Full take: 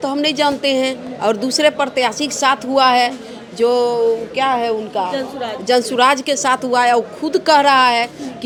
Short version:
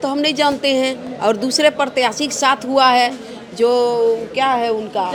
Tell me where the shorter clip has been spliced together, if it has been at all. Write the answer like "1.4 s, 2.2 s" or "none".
none